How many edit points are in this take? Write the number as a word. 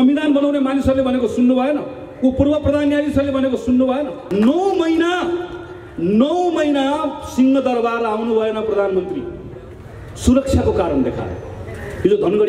one